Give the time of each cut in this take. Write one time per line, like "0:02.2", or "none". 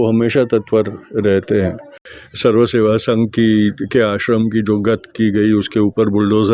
0:02.0